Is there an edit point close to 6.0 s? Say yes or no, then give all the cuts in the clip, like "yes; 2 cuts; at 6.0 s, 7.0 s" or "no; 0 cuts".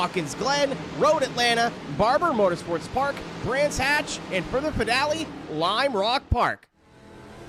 no; 1 cut; at 2.3 s